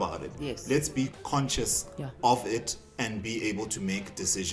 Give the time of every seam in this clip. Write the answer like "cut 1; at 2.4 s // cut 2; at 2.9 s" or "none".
cut 1; at 1.1 s